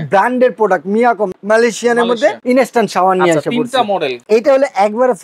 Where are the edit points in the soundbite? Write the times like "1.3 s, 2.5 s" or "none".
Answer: 1.3 s, 2.4 s, 4.2 s